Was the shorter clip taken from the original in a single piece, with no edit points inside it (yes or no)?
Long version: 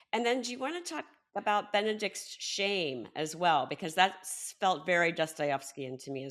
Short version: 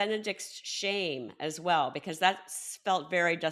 yes